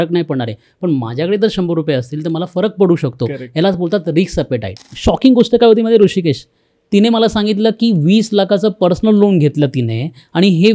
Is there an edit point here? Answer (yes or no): yes